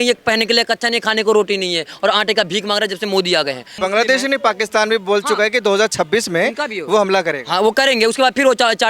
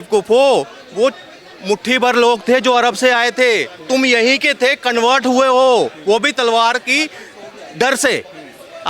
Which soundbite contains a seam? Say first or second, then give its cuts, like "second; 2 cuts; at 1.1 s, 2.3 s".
first; 1 cut; at 3.7 s